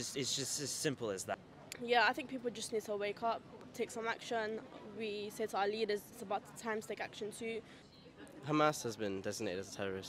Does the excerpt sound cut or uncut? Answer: cut